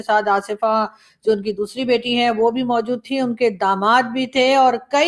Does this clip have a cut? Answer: no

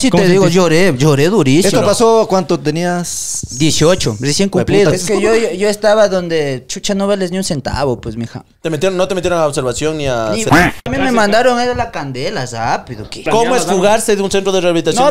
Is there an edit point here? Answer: yes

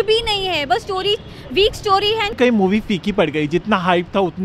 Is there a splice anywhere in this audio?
yes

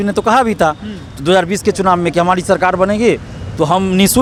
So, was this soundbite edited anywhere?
no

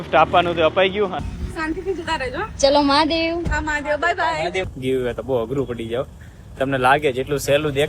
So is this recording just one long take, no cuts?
no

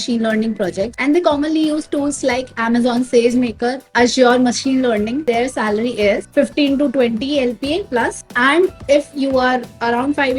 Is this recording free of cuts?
no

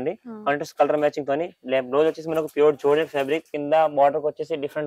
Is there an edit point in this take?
yes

